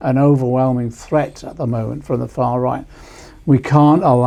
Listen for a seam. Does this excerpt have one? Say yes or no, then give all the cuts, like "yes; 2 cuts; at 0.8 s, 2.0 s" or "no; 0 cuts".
no; 0 cuts